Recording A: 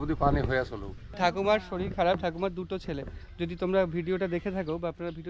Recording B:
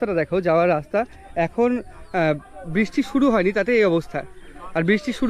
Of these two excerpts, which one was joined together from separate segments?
A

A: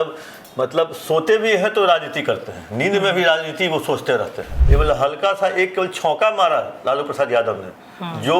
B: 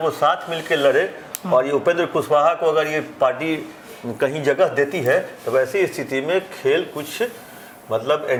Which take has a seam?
A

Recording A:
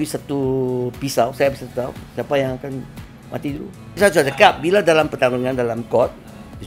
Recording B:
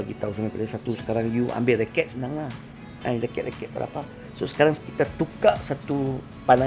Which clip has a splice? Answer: A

